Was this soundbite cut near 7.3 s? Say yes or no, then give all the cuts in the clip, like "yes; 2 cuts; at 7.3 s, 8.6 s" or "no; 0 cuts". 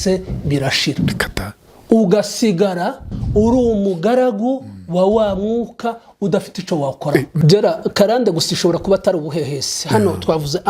yes; 1 cut; at 7.3 s